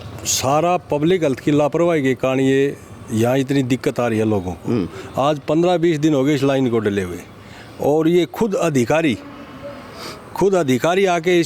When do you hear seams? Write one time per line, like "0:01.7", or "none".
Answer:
none